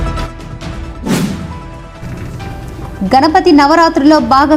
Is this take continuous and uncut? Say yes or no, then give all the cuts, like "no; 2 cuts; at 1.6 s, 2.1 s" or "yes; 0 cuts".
yes; 0 cuts